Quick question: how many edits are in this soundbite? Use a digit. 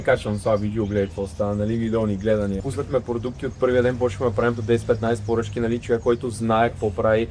1